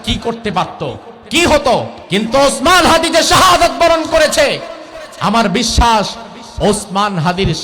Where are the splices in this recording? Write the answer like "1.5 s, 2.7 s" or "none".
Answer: 2.0 s